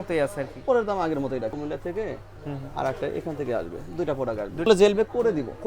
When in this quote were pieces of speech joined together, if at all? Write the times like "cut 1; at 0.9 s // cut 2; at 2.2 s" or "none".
cut 1; at 1.6 s // cut 2; at 4.7 s